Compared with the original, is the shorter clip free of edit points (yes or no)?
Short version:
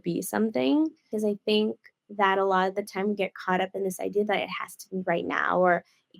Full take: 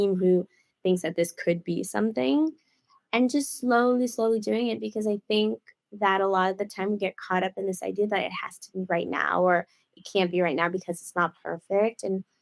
no